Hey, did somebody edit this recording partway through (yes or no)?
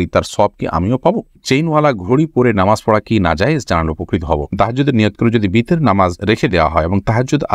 yes